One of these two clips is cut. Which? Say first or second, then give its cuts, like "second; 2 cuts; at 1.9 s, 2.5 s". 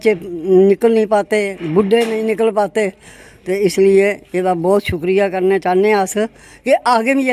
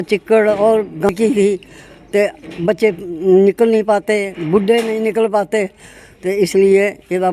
second; 1 cut; at 1.1 s